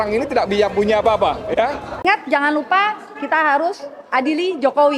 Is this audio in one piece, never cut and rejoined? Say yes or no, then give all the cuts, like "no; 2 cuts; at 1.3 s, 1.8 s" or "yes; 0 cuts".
no; 1 cut; at 1.9 s